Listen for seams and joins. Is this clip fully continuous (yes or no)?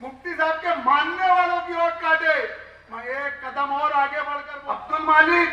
no